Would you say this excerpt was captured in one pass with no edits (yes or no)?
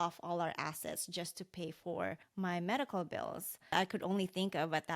no